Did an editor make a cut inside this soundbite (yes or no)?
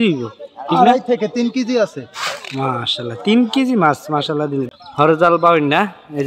yes